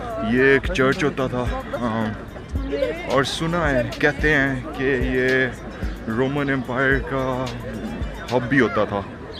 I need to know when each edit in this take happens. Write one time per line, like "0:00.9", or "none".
none